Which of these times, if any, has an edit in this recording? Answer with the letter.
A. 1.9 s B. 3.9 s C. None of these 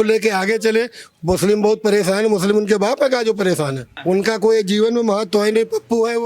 B